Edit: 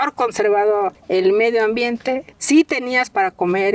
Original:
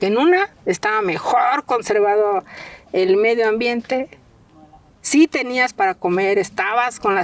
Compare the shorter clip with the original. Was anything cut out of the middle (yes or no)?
yes